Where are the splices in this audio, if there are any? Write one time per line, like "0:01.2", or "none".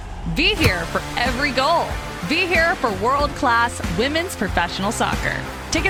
none